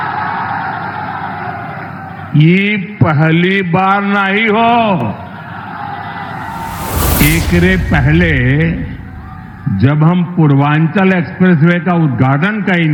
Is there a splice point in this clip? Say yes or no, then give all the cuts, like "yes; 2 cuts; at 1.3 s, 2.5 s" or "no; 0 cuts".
no; 0 cuts